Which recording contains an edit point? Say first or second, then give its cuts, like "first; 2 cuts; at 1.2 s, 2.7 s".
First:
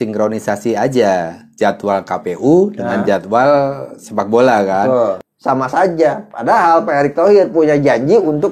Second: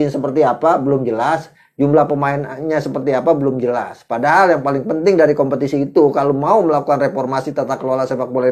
first; 1 cut; at 5.2 s